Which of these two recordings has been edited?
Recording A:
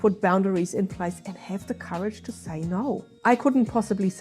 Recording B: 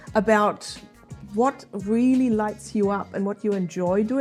A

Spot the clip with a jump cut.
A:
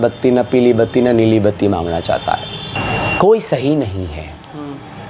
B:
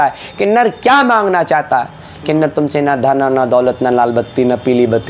A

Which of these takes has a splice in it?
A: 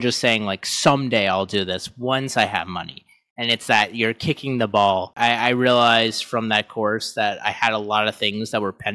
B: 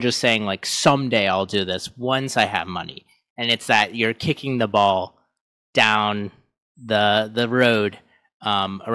A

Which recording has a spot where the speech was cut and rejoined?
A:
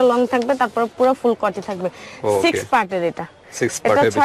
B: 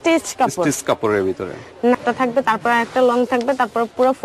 B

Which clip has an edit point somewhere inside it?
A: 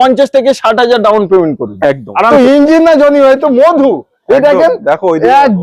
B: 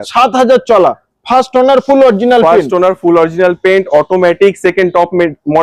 A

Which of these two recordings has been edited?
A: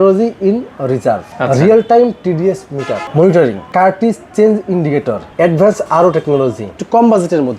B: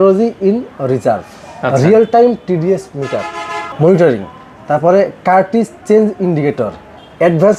A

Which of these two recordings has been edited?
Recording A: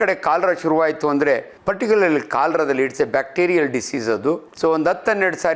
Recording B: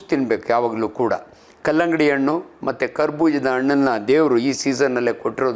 A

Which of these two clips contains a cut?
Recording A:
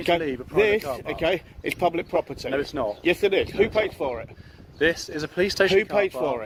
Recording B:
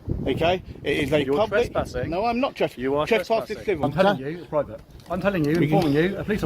B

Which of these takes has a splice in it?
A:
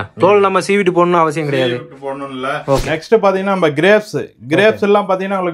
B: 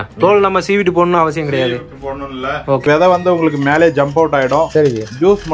B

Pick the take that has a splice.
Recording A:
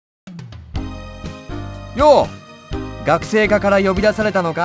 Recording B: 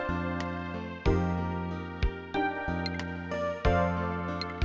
A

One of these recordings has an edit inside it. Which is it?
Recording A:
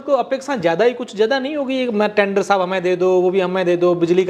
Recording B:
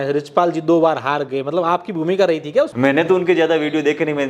B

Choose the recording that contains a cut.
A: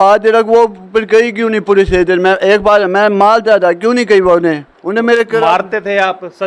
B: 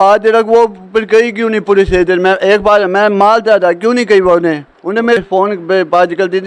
B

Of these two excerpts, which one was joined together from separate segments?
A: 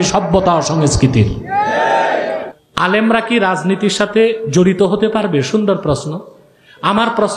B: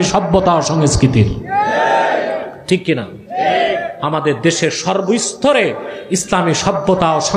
A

